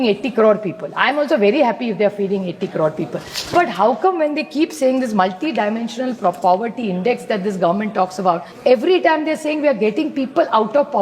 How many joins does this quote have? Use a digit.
1